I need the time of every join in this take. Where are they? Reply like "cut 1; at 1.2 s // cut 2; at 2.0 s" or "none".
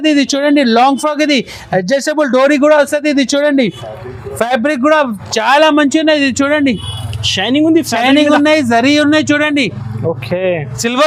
none